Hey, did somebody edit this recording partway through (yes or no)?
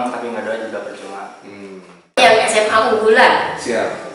yes